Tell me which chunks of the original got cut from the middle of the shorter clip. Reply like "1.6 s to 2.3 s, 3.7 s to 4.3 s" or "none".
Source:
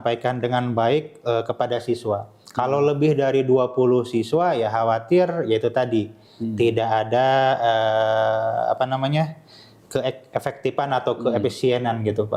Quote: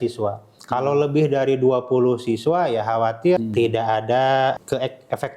5.2 s to 6.4 s, 7.6 s to 9.8 s